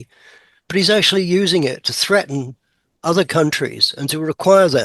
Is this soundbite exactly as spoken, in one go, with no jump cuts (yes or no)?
yes